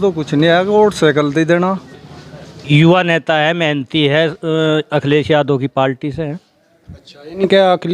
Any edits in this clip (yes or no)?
yes